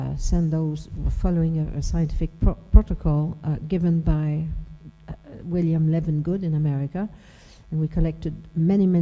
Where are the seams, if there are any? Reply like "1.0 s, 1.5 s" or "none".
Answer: 2.4 s